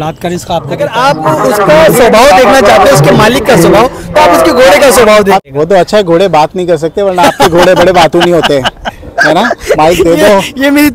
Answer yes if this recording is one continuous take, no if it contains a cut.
no